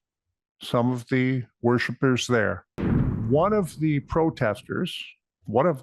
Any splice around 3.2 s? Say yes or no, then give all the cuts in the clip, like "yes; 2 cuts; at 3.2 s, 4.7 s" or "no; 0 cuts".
yes; 1 cut; at 3.2 s